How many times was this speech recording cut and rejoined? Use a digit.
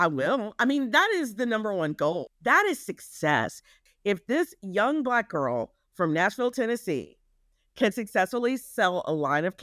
2